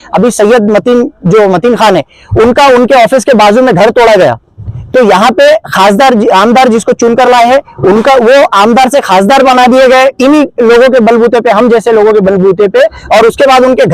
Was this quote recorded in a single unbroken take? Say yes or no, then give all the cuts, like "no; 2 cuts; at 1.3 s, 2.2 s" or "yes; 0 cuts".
yes; 0 cuts